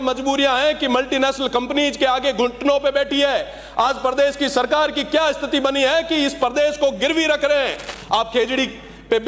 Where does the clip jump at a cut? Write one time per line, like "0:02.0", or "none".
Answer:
0:07.9

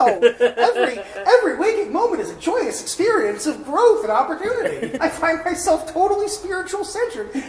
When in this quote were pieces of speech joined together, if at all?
0:04.9

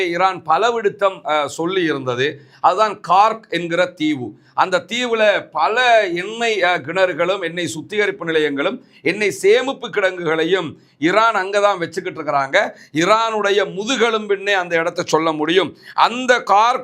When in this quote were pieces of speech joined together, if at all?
none

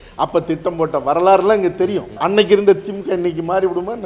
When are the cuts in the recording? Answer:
0:02.2

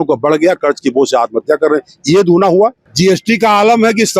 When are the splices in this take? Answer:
0:02.8

